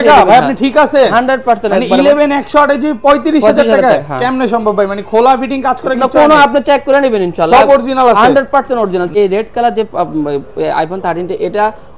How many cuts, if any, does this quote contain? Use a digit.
1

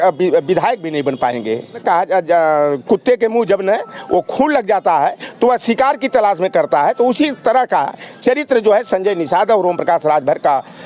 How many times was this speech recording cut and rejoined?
1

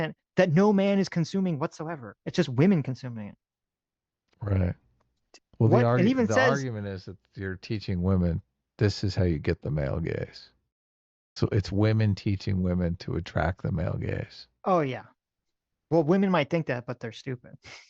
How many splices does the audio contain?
0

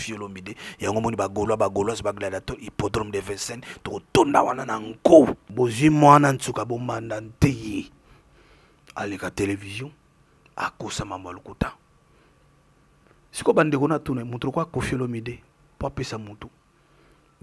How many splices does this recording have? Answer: 1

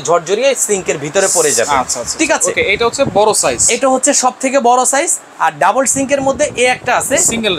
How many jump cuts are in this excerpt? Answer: 0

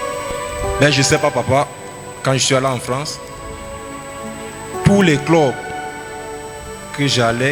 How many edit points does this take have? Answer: 0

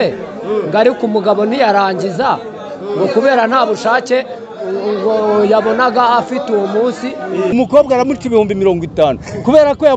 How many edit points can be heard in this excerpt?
1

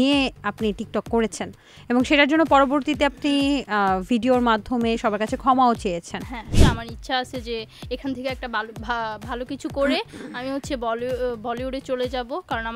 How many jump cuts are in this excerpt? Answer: 1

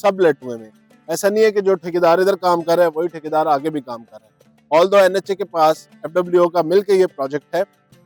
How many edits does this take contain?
0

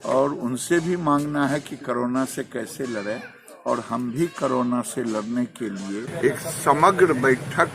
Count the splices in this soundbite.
1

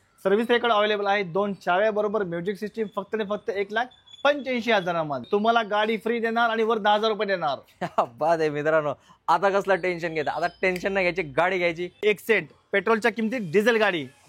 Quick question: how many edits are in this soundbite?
2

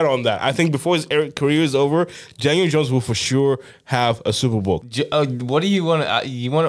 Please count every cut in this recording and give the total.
1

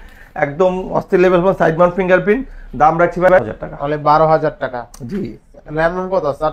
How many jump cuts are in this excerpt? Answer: 1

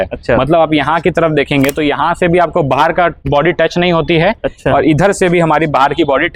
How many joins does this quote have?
0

